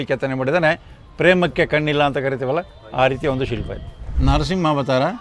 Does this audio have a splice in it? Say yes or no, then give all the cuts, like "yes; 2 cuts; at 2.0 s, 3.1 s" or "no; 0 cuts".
yes; 1 cut; at 4.1 s